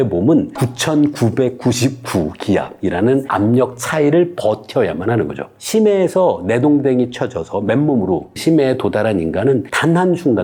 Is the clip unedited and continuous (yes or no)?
yes